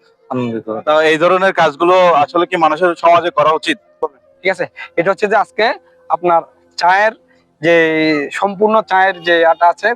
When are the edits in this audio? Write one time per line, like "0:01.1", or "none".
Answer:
0:04.1